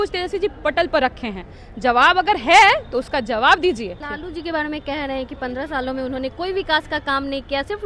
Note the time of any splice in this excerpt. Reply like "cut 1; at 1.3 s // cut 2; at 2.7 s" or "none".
cut 1; at 4.0 s